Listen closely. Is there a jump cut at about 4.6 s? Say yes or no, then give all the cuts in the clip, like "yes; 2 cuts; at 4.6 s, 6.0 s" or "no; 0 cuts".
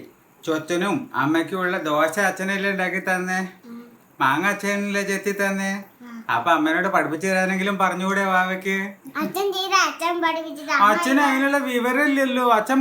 no; 1 cut; at 9.0 s